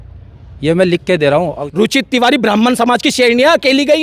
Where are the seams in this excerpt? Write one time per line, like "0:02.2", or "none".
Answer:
0:01.6